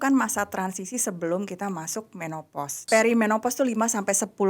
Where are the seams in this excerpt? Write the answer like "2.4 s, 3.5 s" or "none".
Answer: 2.9 s